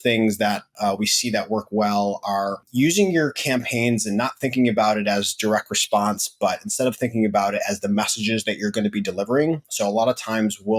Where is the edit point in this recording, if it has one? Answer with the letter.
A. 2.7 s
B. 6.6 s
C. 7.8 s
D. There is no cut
A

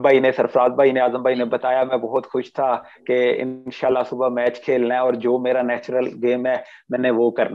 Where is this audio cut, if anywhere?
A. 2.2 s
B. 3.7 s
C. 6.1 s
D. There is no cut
D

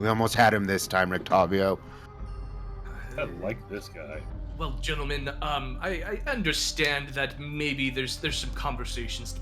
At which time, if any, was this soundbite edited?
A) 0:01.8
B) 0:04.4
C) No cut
B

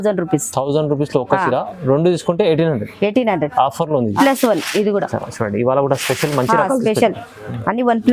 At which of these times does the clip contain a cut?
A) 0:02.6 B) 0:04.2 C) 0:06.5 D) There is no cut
B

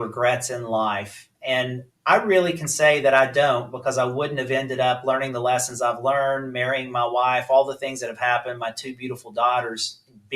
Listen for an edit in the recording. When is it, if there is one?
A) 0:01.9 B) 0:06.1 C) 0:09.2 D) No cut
A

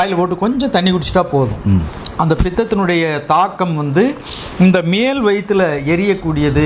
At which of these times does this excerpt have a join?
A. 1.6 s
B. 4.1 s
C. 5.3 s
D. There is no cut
D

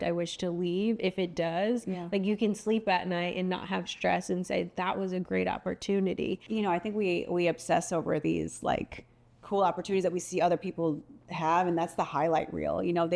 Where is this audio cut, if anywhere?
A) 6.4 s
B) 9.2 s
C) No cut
A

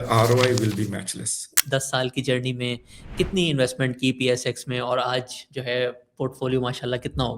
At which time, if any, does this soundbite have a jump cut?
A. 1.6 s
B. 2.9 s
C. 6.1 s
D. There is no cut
A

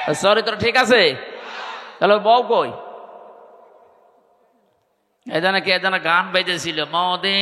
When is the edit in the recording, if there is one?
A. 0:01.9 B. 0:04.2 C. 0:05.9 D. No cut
D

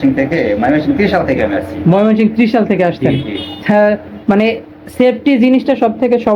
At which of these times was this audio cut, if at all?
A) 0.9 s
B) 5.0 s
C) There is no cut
C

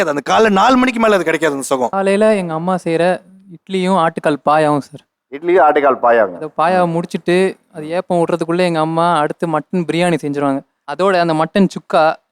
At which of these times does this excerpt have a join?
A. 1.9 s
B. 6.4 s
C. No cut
A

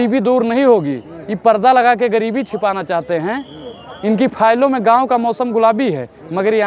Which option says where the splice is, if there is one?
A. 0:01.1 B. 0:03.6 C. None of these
C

